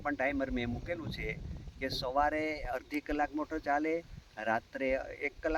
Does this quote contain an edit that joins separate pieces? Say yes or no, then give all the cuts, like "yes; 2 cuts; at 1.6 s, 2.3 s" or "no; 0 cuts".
no; 0 cuts